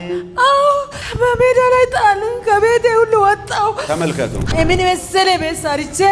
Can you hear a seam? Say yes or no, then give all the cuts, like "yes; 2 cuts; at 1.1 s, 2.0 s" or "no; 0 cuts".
yes; 2 cuts; at 1.0 s, 4.5 s